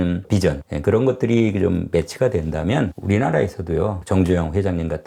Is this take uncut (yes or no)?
yes